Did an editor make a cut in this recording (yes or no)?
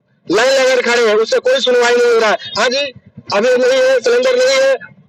no